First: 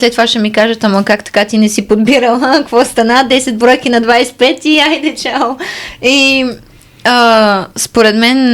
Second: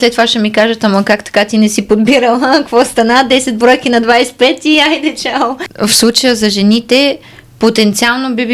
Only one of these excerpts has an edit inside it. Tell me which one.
second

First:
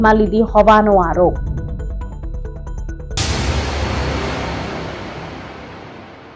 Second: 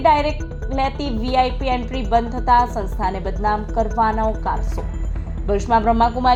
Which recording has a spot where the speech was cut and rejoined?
first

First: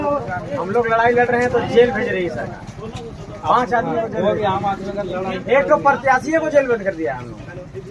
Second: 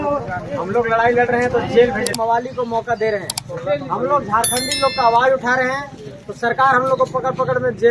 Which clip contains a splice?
second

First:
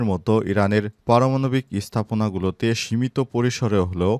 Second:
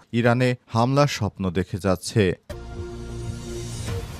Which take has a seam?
second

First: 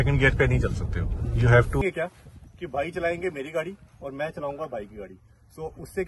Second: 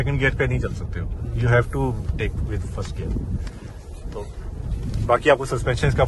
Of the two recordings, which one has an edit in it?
first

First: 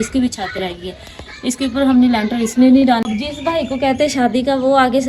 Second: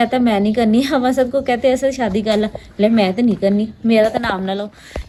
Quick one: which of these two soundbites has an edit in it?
first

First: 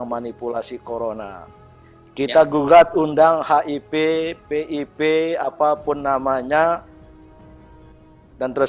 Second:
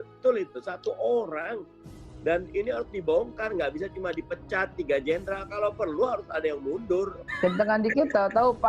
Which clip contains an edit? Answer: second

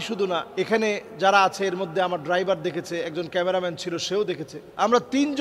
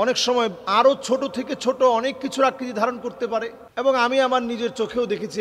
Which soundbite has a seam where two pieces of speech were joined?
second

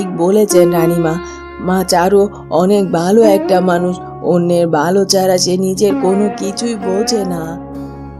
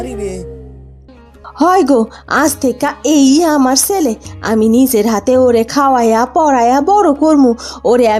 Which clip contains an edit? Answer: second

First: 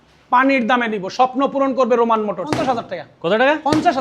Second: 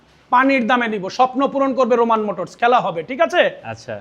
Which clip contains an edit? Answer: first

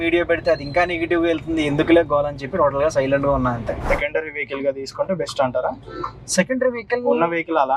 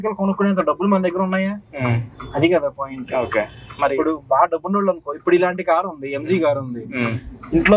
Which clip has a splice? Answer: first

